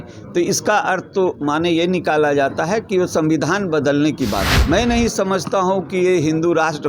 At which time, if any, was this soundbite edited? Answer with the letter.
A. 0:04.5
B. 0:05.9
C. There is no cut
A